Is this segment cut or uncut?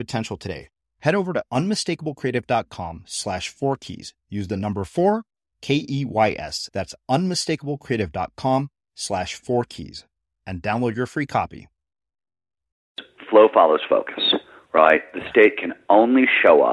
cut